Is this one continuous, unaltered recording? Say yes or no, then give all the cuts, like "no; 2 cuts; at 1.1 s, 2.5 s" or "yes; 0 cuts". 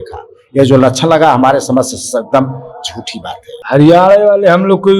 no; 1 cut; at 3.5 s